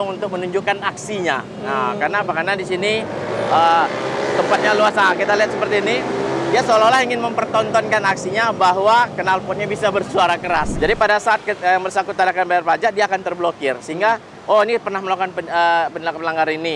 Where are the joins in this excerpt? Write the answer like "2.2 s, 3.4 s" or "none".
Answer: 10.7 s

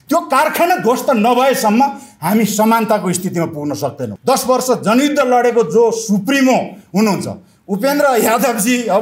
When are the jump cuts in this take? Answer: 4.1 s

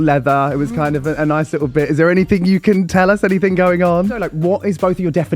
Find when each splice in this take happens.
4.3 s

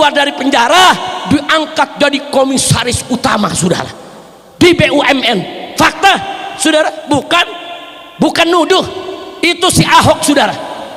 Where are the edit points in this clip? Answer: none

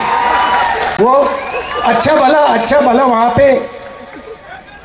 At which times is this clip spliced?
none

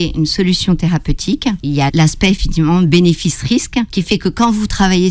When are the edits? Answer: 1.9 s, 4.0 s

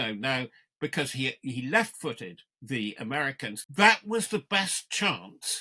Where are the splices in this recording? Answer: 3.6 s

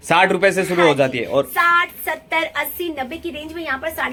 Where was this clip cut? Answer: none

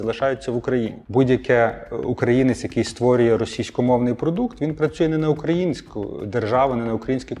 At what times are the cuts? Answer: 1.0 s

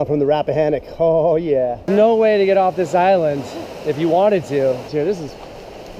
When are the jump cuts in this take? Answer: 1.8 s, 4.9 s

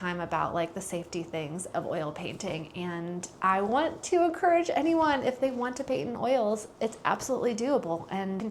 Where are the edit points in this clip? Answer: none

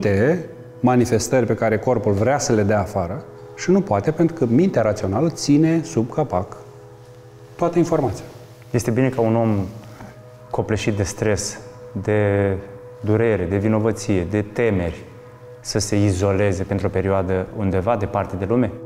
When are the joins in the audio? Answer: none

